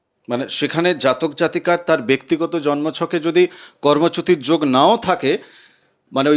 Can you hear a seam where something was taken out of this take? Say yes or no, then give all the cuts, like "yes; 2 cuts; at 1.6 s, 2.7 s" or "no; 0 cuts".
no; 0 cuts